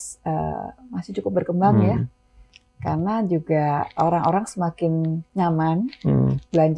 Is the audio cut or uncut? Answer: uncut